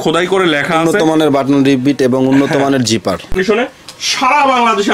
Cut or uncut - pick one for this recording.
uncut